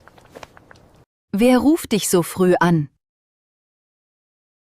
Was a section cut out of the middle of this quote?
yes; 1 cut; at 1.0 s

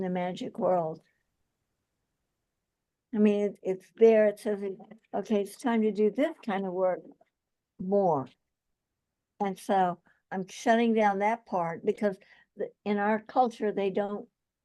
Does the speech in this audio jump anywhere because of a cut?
yes; 1 cut; at 3.5 s

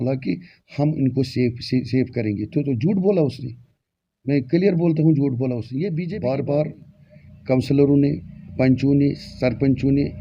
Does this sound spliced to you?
yes; 1 cut; at 6.1 s

